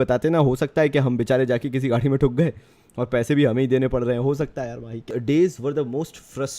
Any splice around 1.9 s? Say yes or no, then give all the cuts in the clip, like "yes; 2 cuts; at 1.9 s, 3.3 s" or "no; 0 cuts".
no; 1 cut; at 5.0 s